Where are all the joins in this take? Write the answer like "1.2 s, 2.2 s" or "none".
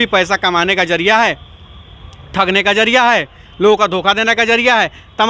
none